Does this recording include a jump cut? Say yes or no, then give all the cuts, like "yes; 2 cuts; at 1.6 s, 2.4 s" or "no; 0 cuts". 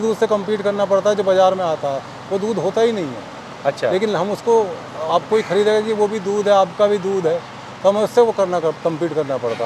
no; 0 cuts